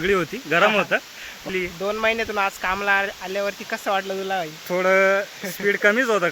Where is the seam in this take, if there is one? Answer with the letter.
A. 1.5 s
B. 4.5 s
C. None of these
A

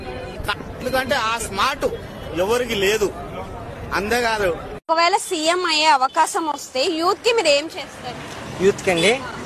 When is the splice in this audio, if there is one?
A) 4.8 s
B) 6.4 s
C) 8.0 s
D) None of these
A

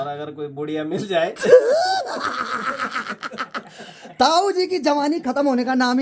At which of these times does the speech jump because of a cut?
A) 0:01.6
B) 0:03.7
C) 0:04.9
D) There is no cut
D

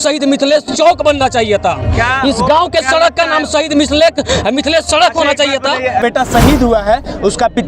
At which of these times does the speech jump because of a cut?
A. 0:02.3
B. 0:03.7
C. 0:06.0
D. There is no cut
C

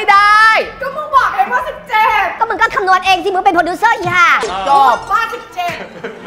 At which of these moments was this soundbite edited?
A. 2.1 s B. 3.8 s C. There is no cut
C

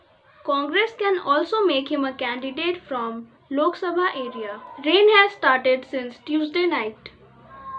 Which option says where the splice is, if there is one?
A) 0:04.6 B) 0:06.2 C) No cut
A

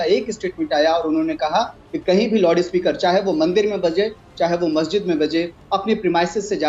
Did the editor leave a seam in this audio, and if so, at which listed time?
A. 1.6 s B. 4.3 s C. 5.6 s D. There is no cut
D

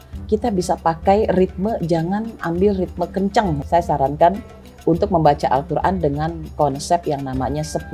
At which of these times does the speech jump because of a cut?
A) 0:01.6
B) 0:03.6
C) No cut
B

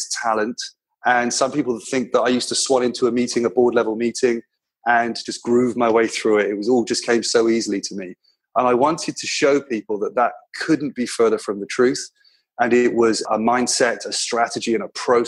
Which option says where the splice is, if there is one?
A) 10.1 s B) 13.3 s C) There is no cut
B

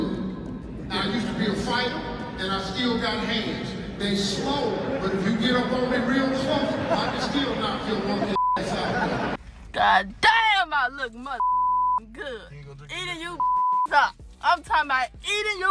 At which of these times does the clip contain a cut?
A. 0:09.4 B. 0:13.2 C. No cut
A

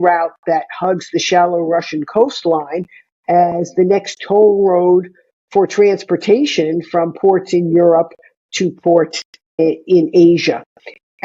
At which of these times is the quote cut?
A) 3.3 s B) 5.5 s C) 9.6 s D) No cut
C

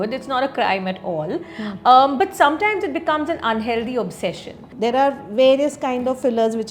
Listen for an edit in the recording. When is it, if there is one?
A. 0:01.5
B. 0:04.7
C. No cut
B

